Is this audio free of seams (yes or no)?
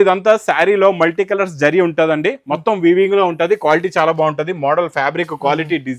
yes